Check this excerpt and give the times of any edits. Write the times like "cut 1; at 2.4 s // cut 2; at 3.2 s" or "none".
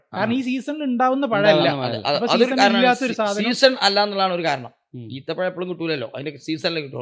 none